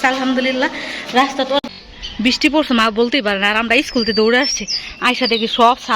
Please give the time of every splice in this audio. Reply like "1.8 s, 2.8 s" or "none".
1.7 s